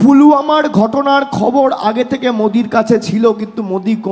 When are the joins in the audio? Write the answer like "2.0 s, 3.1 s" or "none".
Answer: none